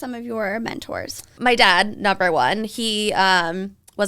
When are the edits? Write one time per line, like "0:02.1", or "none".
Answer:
0:01.3